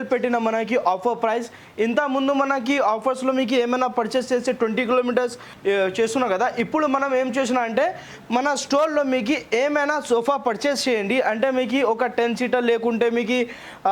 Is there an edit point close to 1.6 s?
no; 0 cuts

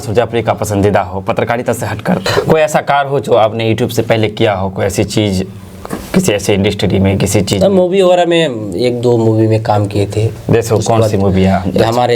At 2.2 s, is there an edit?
yes; 1 cut; at 2.2 s

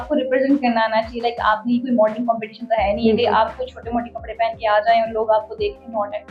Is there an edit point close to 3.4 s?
no; 0 cuts

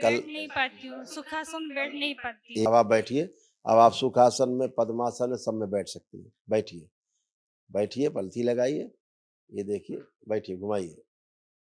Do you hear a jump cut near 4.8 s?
no; 1 cut; at 2.7 s

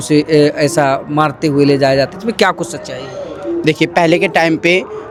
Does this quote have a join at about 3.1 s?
no; 0 cuts

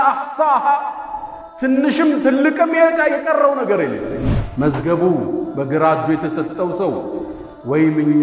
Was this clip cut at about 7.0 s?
no; 1 cut; at 4.4 s

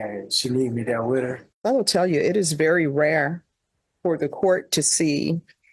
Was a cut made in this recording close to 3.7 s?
no; 1 cut; at 1.5 s

